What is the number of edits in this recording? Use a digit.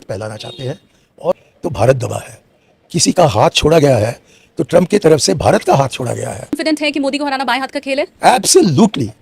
2